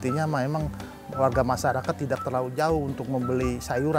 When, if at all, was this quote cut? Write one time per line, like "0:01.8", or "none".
none